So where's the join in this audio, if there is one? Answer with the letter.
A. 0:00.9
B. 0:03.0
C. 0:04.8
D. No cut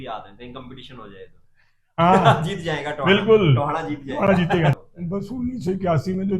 C